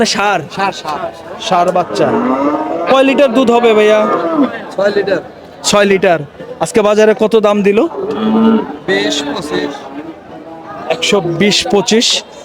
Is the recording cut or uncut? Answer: uncut